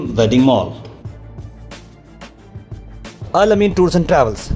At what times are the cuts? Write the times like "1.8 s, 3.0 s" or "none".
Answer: 0.9 s, 3.1 s